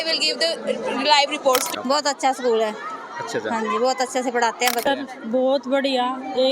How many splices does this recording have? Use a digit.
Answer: 2